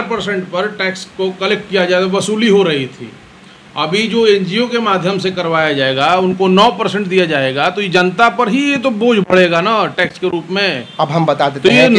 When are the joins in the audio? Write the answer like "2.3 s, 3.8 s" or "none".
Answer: none